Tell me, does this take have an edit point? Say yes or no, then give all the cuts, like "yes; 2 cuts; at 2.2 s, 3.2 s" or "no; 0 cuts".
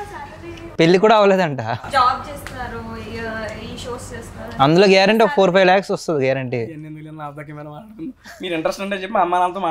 no; 0 cuts